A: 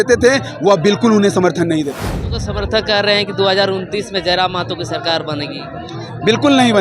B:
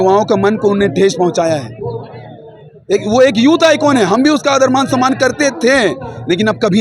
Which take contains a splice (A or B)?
A